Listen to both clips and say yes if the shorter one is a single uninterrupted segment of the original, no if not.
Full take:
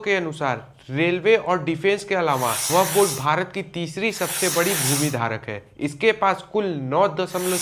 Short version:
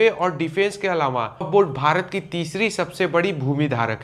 no